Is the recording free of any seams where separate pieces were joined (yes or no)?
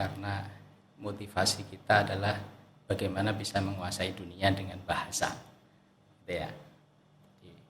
yes